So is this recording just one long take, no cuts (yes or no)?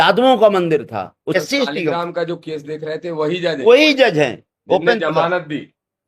no